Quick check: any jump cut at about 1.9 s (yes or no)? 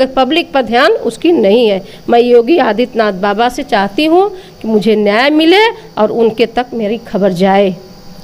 no